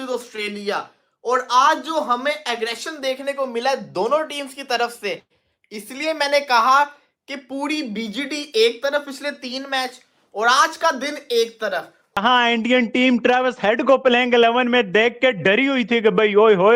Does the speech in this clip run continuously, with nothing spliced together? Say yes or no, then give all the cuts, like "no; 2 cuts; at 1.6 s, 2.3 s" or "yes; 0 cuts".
no; 1 cut; at 12.2 s